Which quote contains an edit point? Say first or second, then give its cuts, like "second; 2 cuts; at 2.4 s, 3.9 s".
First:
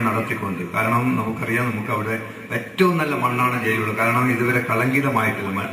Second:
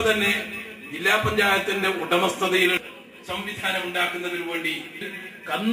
first; 1 cut; at 3.7 s